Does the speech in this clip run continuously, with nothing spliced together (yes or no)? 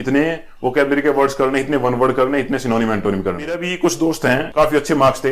no